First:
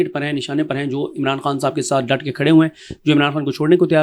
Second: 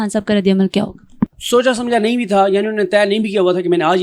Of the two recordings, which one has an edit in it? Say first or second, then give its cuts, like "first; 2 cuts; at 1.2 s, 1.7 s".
second; 1 cut; at 1.3 s